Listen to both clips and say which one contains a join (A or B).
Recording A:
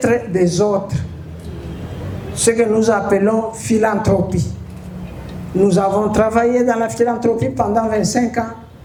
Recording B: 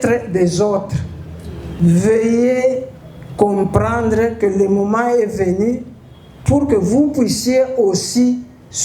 B